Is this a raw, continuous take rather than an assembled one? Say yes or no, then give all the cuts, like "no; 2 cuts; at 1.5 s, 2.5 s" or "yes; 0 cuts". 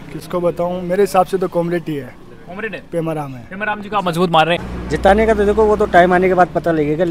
no; 1 cut; at 4.7 s